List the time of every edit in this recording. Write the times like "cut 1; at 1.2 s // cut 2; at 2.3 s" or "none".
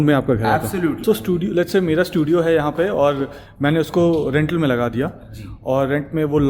cut 1; at 1.0 s